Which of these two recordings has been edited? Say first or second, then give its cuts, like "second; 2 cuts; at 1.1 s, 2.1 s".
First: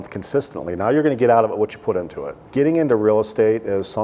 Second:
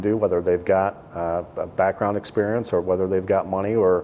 first; 1 cut; at 2.3 s